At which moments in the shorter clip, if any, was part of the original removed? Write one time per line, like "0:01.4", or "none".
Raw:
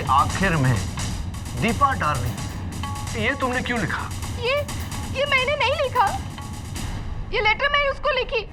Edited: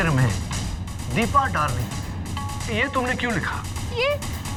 none